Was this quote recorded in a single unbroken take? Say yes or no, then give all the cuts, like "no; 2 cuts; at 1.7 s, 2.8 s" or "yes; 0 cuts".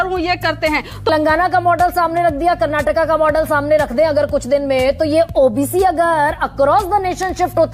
no; 1 cut; at 1.1 s